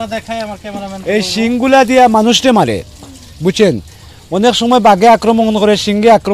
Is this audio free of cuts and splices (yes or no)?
yes